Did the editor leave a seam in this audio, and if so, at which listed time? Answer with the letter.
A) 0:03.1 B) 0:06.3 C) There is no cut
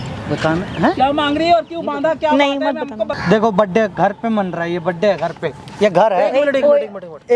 A